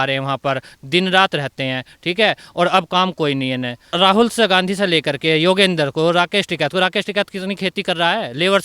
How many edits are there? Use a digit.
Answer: 1